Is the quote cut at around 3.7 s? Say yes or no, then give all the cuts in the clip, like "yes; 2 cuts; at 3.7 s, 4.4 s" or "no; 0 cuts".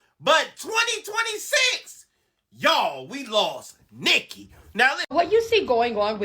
no; 1 cut; at 5.0 s